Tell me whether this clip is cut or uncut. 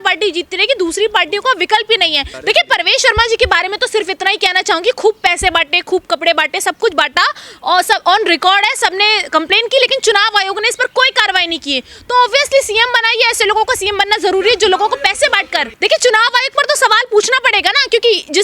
cut